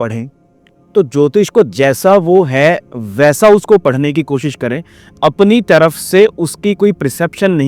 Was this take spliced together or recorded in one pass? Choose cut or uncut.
uncut